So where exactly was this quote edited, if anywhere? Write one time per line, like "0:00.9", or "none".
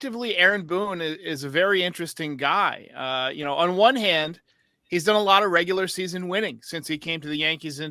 none